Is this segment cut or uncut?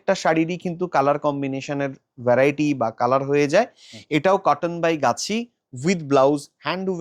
uncut